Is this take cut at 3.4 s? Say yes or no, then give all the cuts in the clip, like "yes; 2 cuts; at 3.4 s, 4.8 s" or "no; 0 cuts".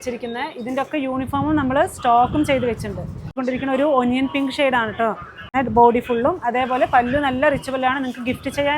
yes; 2 cuts; at 3.4 s, 5.5 s